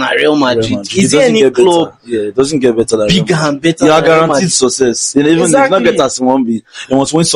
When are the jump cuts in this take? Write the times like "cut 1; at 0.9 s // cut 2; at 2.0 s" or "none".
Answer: none